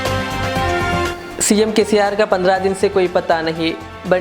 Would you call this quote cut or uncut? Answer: cut